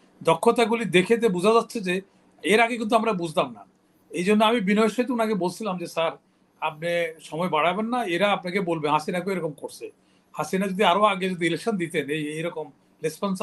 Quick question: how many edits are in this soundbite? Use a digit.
0